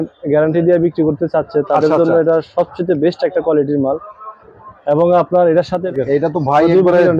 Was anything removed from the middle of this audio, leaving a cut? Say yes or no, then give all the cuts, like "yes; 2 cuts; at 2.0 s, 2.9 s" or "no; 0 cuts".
yes; 1 cut; at 5.9 s